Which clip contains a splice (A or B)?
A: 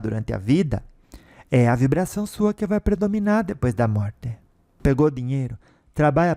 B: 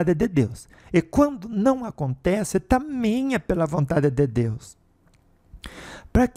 A